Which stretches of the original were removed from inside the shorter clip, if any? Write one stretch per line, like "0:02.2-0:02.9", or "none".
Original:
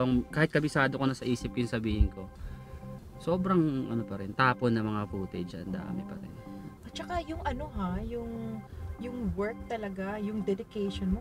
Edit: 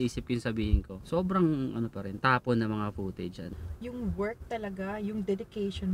0:02.2-0:03.1
0:05.6-0:08.7